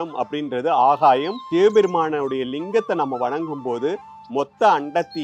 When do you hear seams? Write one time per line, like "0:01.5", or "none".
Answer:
0:01.4

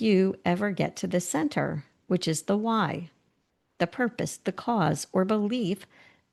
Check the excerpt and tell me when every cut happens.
none

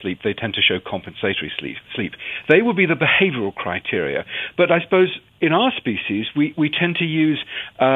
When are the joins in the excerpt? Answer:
0:05.7

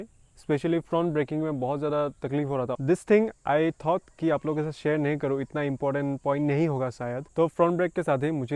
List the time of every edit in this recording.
0:02.7
0:07.3

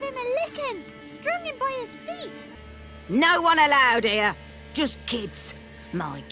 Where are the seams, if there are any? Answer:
0:02.5

